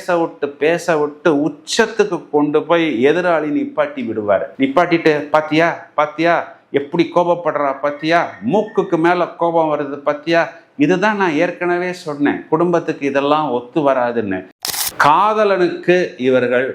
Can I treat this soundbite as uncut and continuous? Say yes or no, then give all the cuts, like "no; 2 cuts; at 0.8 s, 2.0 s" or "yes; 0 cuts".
no; 1 cut; at 14.5 s